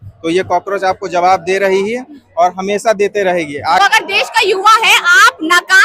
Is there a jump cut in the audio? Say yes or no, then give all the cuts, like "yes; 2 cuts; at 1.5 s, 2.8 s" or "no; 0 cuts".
yes; 1 cut; at 3.8 s